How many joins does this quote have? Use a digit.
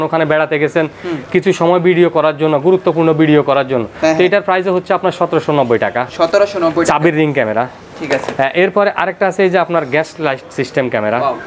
0